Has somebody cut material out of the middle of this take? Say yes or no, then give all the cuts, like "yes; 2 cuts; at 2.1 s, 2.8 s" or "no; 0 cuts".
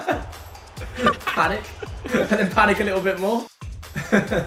no; 0 cuts